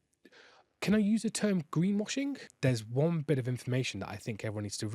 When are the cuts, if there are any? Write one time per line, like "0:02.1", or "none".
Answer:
0:02.5